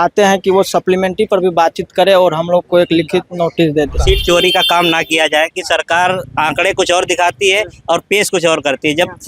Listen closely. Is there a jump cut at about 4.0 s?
yes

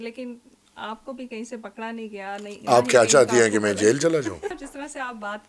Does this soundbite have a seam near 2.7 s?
no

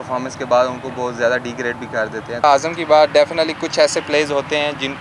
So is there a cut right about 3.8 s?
no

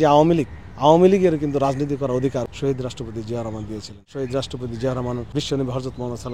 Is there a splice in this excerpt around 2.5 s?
yes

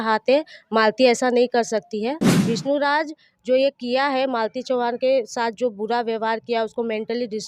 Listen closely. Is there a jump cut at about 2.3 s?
yes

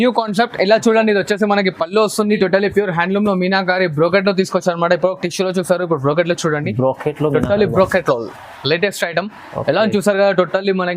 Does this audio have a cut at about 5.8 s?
no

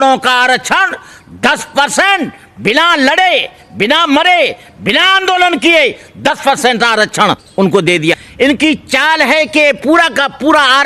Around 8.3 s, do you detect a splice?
yes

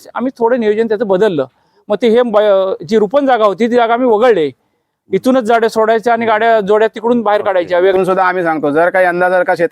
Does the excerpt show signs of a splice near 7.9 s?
yes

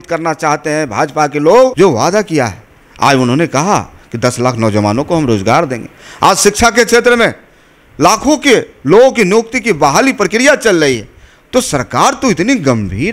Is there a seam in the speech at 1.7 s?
yes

